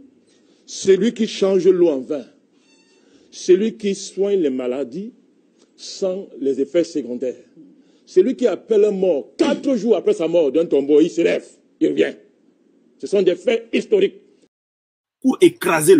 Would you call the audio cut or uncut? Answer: cut